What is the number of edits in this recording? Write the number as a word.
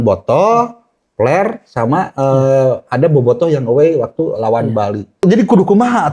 one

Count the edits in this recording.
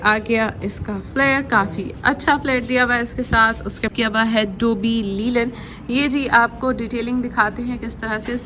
one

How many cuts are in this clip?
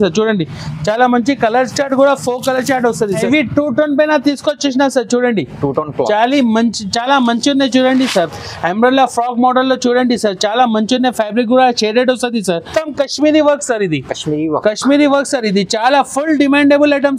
two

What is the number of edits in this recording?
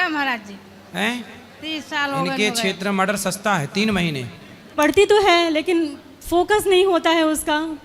one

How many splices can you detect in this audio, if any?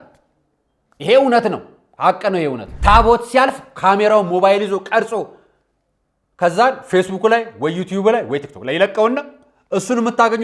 one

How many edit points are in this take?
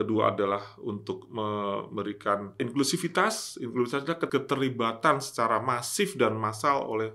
two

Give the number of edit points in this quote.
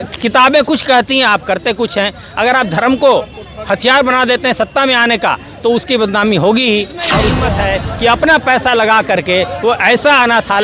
one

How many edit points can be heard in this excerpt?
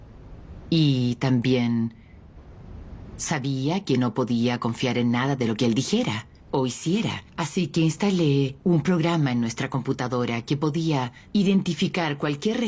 one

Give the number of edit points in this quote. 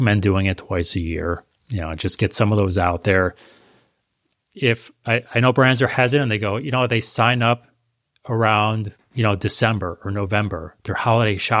zero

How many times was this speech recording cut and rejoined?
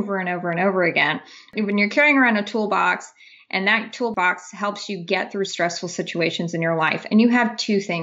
two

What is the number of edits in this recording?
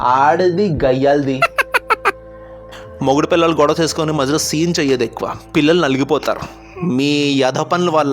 two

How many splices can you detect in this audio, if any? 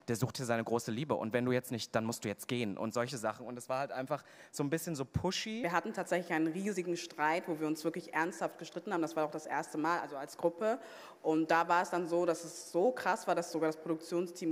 one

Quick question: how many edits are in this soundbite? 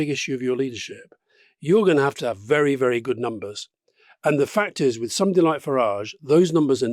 zero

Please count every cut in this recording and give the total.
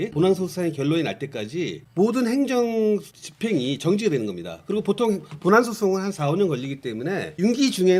zero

